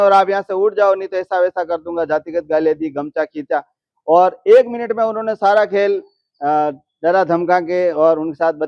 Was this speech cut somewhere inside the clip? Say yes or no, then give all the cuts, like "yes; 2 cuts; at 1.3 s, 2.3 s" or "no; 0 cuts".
no; 0 cuts